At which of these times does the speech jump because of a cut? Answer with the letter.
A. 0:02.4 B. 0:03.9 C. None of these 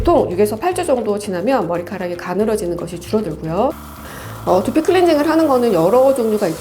B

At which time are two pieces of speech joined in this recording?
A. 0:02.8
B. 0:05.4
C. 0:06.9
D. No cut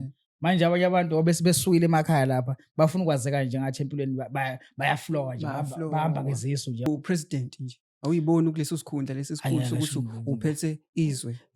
C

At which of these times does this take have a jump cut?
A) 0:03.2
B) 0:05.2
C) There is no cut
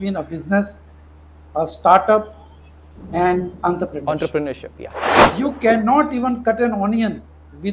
B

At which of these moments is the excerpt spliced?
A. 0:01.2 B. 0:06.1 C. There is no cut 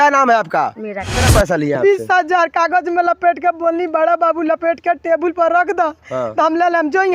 A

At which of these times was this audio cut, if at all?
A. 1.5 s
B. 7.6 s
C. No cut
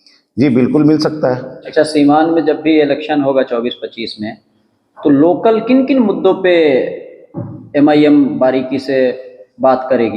A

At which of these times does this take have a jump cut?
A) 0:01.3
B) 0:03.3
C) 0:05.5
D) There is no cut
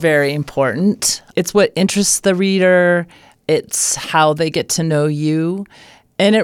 A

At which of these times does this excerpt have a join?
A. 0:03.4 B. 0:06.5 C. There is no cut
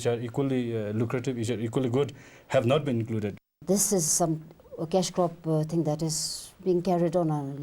A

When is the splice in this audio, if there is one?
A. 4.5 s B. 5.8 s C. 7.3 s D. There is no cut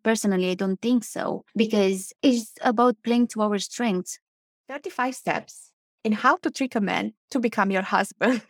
A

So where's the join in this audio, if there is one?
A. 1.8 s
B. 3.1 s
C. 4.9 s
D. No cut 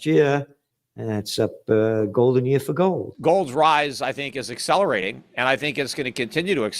B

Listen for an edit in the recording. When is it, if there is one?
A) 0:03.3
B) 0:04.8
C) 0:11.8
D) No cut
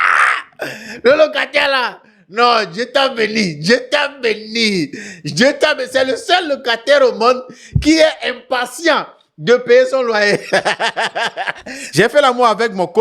C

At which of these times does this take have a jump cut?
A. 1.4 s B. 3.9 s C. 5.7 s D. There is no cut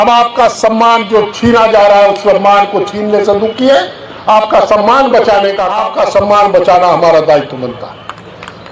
C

